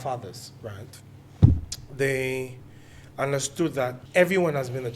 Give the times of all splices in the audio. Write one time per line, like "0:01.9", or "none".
0:04.0